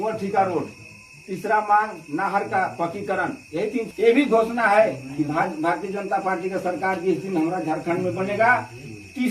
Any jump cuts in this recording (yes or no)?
yes